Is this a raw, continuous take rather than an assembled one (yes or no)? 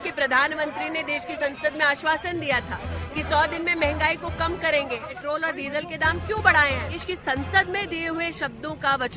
no